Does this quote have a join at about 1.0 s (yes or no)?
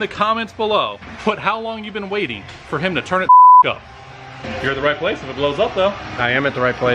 yes